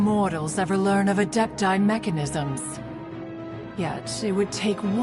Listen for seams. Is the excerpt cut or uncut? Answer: uncut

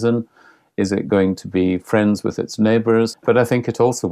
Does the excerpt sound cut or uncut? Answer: cut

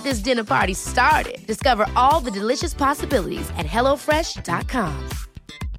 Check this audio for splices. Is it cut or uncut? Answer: uncut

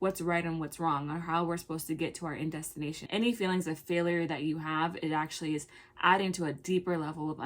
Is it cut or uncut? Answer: cut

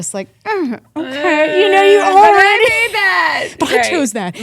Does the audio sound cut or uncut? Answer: uncut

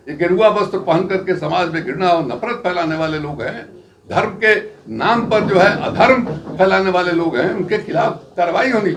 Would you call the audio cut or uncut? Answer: uncut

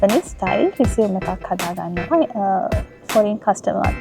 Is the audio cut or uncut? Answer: cut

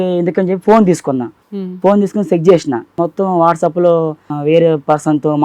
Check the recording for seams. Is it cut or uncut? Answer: cut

